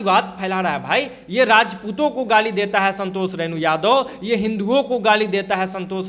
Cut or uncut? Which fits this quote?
uncut